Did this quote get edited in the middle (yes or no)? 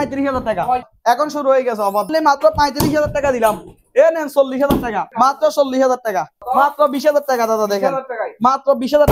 yes